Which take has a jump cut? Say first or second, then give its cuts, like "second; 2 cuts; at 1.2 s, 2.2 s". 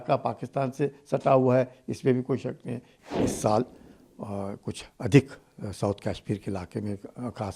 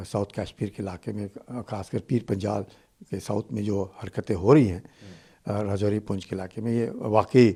first; 1 cut; at 2.9 s